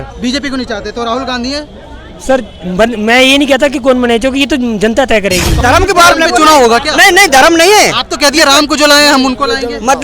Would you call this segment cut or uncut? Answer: cut